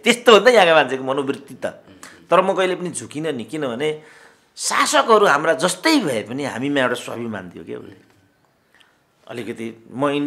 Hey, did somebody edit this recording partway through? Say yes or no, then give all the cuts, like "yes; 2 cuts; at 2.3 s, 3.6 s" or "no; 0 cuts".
no; 0 cuts